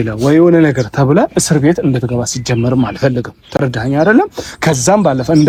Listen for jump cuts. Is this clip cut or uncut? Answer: uncut